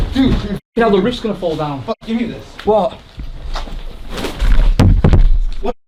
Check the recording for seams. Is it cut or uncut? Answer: uncut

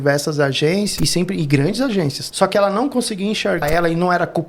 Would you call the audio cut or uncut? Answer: cut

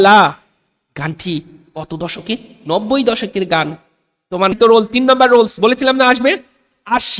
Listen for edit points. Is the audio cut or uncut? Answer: cut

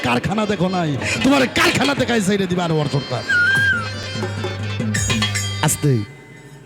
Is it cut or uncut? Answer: uncut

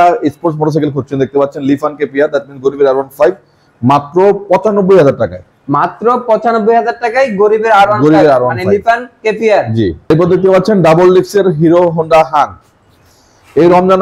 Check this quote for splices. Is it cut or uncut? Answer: uncut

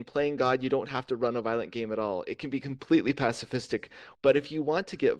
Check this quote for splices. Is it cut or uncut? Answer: cut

